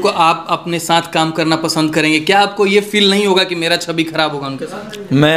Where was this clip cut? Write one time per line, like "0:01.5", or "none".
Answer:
none

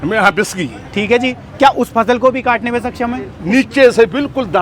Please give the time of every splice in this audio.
0:03.3

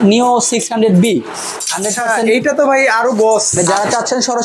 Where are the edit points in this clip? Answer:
0:03.5

